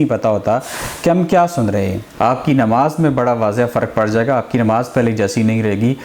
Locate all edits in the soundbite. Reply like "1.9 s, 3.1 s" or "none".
2.0 s